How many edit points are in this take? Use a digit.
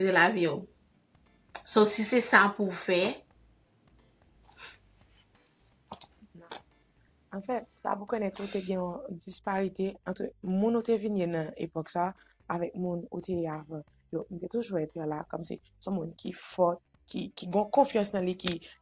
0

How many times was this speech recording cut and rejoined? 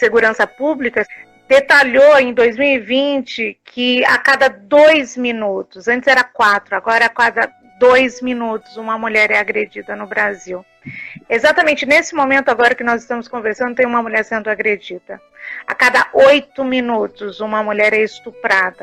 1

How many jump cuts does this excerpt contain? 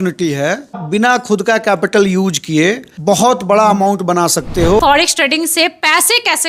3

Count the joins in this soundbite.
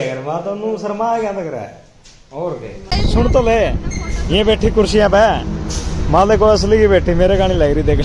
1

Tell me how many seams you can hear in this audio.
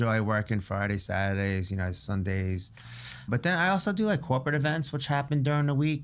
1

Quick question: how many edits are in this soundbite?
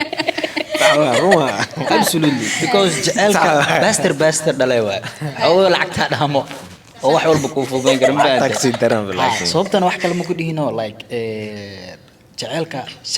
1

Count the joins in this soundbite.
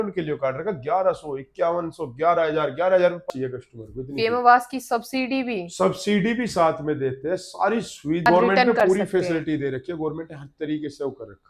2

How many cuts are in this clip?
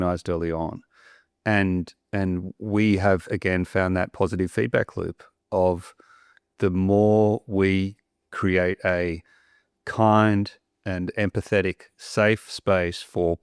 1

